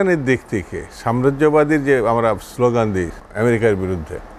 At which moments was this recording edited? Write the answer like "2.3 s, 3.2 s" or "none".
3.2 s